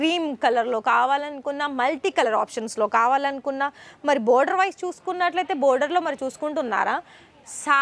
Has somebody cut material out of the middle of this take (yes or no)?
no